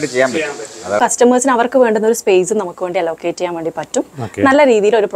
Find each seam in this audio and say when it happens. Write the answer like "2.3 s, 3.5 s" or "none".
1.0 s